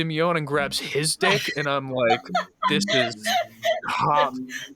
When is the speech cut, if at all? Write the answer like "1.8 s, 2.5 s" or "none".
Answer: none